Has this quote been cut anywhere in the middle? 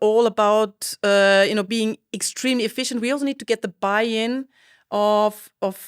no; 0 cuts

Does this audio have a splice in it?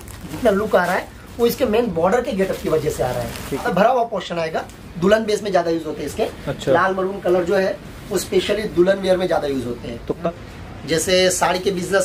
yes; 2 cuts; at 3.6 s, 10.2 s

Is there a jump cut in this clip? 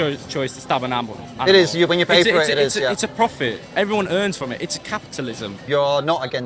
yes; 1 cut; at 5.5 s

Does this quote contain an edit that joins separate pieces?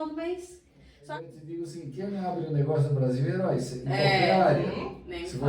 yes; 1 cut; at 1.1 s

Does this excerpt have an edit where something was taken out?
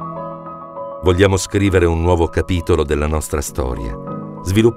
yes; 1 cut; at 1.0 s

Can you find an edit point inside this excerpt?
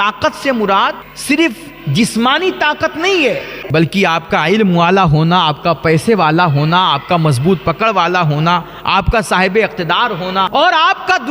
yes; 3 cuts; at 1.1 s, 3.6 s, 10.5 s

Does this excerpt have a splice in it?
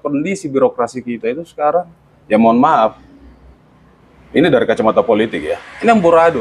no; 0 cuts

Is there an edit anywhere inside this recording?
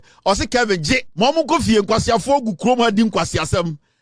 yes; 1 cut; at 1.1 s

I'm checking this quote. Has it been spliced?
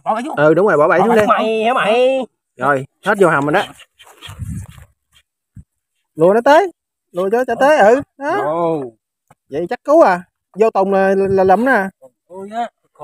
no; 0 cuts

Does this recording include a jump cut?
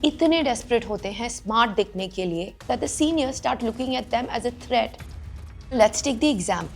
yes; 1 cut; at 5.0 s

